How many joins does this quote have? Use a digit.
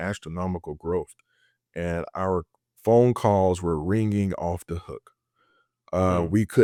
0